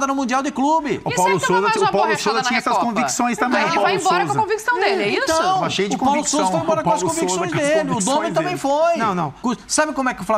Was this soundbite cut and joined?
yes; 1 cut; at 9.4 s

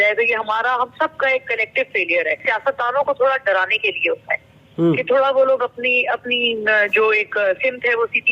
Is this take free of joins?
no; 1 cut; at 2.4 s

